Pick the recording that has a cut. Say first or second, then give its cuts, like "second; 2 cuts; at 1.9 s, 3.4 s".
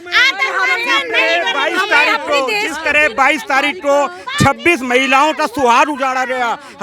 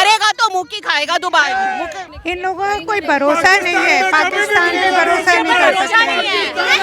second; 1 cut; at 2.0 s